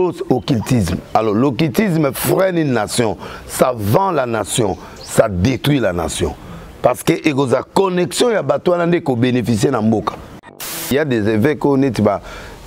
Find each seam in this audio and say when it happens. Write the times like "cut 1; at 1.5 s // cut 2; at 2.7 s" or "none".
cut 1; at 10.9 s

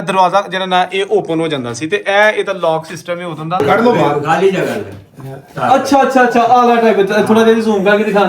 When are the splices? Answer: cut 1; at 3.6 s

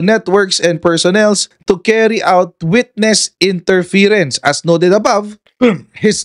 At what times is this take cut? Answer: none

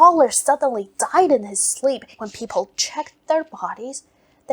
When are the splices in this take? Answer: cut 1; at 2.1 s

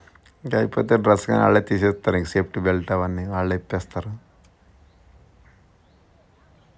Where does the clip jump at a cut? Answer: none

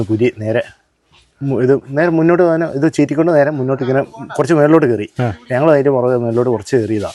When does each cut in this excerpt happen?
none

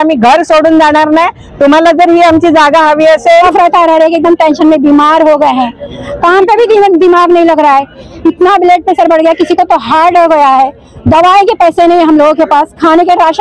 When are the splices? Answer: cut 1; at 3.5 s

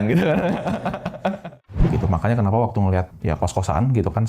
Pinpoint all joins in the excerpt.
cut 1; at 1.9 s // cut 2; at 3.1 s

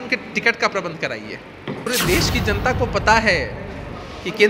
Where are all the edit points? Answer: cut 1; at 1.8 s

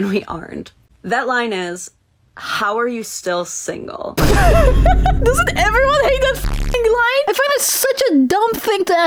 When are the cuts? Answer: none

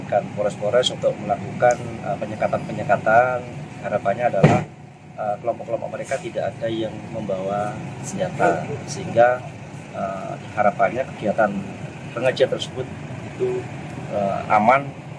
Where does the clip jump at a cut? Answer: none

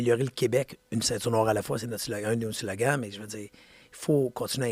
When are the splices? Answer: none

